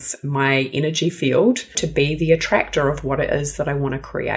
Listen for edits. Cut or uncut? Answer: cut